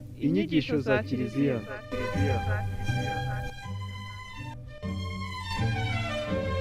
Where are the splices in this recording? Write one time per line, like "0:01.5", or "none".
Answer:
0:01.6